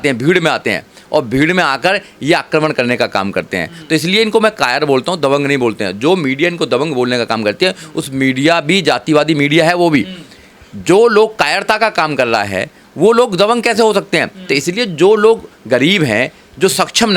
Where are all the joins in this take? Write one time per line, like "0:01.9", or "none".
none